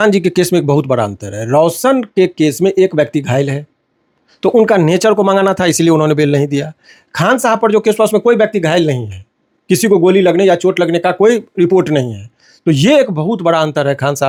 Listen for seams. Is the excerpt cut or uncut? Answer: uncut